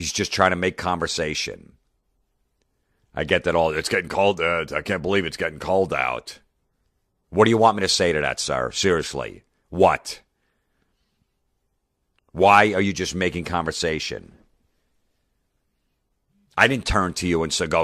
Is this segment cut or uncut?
cut